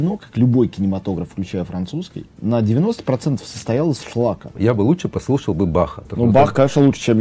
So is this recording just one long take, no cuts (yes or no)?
no